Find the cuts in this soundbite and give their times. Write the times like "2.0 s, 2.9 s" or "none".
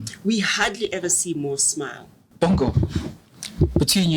2.3 s